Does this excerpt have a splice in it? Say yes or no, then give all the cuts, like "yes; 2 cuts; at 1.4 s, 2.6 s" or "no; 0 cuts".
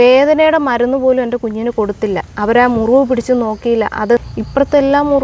yes; 1 cut; at 4.2 s